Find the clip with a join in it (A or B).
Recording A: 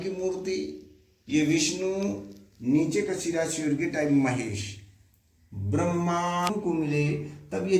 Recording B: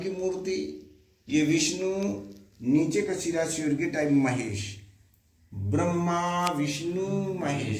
A